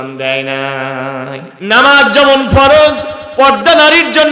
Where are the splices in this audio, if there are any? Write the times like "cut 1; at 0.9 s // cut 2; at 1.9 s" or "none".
cut 1; at 1.4 s